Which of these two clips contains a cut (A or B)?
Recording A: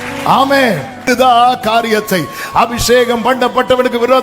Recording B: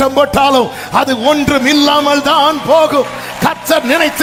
A